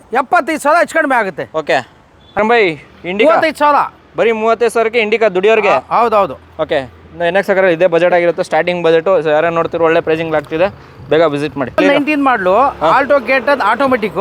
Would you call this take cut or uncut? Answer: uncut